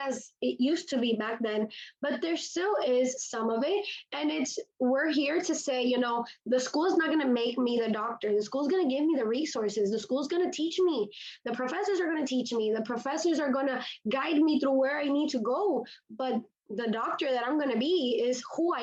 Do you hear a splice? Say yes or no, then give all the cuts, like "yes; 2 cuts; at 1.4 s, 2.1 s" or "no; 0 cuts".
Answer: no; 0 cuts